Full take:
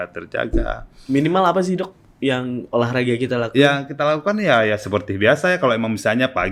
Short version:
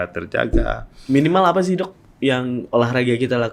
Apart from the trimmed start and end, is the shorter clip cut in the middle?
no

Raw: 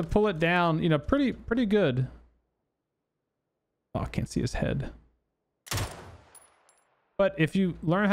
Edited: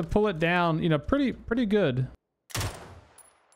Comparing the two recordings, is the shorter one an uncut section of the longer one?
no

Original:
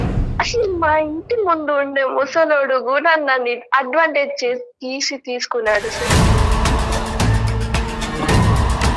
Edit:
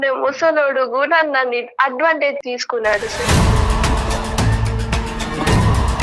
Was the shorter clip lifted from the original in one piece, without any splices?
no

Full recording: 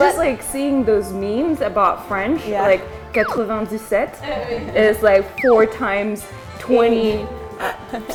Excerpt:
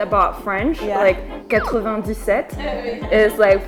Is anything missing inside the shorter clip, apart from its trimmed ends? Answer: no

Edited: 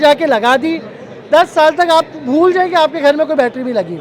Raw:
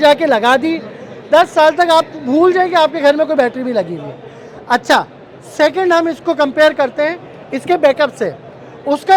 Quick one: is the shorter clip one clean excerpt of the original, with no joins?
yes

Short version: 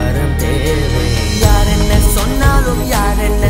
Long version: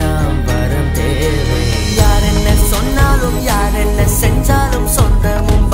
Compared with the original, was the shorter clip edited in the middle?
no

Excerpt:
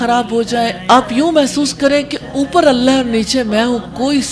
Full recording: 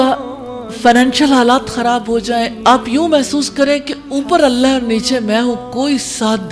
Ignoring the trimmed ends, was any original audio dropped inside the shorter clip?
no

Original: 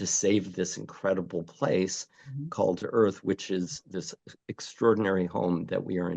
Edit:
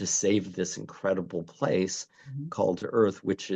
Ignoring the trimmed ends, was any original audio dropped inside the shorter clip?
no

